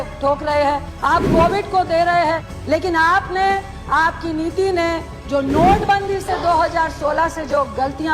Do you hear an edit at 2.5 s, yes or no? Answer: yes